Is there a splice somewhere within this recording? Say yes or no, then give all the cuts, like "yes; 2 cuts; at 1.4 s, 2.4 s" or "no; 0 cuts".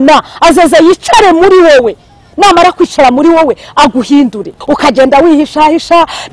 yes; 1 cut; at 4.5 s